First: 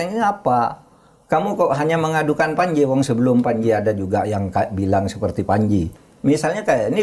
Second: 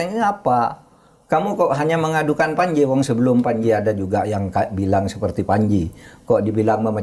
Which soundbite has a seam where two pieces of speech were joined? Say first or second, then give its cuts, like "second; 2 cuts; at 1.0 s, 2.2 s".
first; 1 cut; at 6.0 s